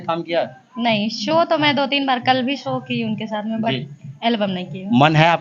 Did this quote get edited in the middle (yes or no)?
no